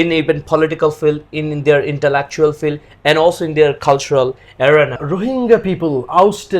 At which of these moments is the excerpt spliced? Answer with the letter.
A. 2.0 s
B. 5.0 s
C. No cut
B